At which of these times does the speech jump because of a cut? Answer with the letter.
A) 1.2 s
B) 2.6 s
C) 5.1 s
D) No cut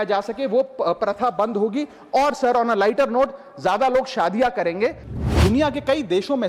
C